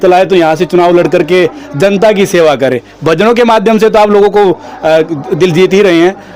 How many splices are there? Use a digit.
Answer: 0